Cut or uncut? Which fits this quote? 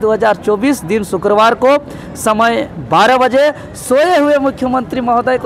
uncut